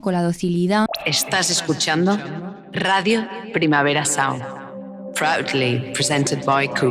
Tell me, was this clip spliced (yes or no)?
yes